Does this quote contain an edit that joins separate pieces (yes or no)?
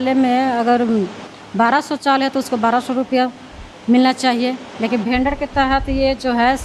no